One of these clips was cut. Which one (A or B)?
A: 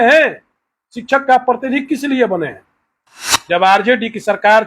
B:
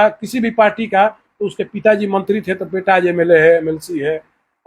A